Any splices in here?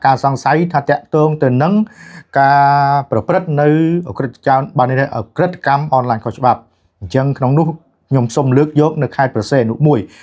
no; 0 cuts

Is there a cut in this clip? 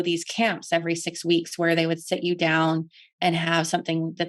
no; 0 cuts

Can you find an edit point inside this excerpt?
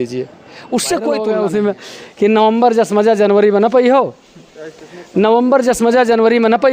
yes; 1 cut; at 1.2 s

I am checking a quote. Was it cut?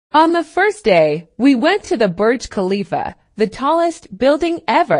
yes; 1 cut; at 3.2 s

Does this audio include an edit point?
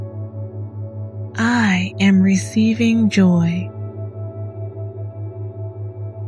yes; 2 cuts; at 1.3 s, 3.7 s

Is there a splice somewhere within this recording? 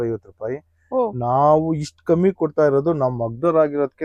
no; 0 cuts

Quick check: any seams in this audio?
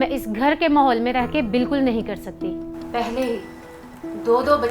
no; 0 cuts

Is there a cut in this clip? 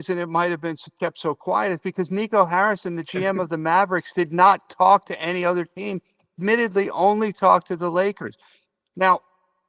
no; 0 cuts

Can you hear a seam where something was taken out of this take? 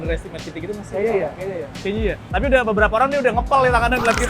yes; 1 cut; at 2.3 s

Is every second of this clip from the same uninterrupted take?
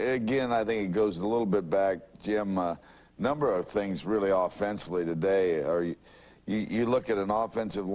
no; 1 cut; at 4.1 s

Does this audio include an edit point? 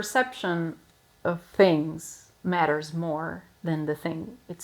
yes; 1 cut; at 1.4 s

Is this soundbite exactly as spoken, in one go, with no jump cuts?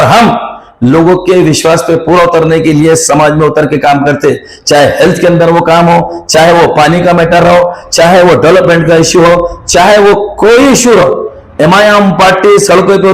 yes; 0 cuts

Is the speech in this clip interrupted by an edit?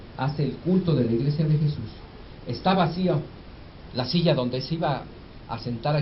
yes; 1 cut; at 1.2 s

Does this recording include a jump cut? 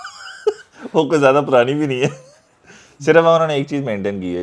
no; 0 cuts

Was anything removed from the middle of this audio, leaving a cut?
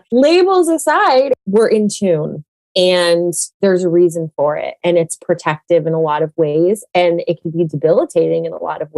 yes; 1 cut; at 1.4 s

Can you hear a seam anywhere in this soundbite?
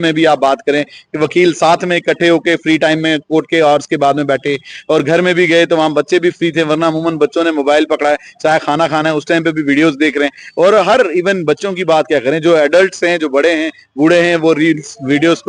no; 0 cuts

